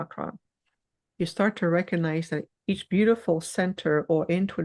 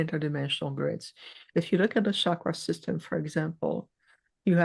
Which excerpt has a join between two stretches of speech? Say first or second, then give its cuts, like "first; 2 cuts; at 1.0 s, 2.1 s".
first; 1 cut; at 2.5 s